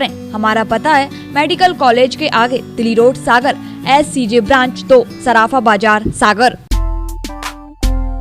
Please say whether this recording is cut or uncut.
cut